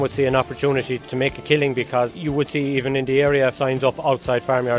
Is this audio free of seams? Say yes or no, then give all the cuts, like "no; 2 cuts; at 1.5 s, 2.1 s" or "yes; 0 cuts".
no; 2 cuts; at 1.0 s, 3.6 s